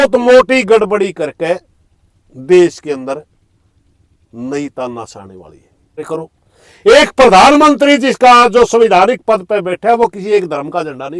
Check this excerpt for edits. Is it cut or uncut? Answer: cut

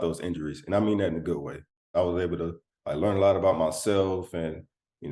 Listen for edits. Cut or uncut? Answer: cut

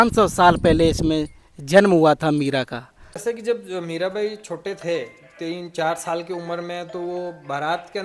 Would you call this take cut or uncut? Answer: cut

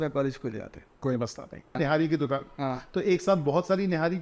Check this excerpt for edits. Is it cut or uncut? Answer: cut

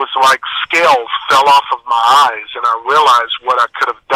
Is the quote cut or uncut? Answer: uncut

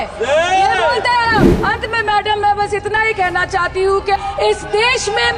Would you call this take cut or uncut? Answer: cut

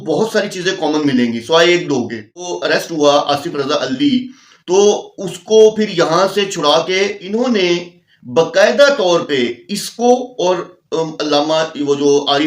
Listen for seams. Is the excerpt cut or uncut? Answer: cut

